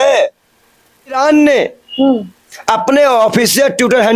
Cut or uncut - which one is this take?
cut